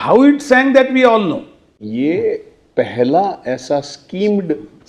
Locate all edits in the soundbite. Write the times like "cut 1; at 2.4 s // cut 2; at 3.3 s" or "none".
cut 1; at 1.8 s